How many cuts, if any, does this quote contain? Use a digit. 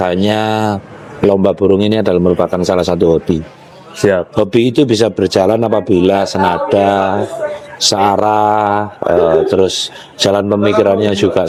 0